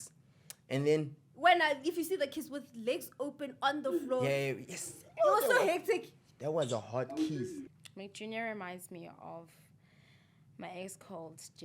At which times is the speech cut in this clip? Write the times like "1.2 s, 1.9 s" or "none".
7.6 s